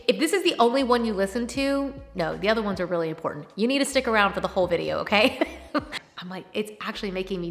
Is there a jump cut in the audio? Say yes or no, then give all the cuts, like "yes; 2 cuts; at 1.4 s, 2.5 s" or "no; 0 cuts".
yes; 1 cut; at 5.9 s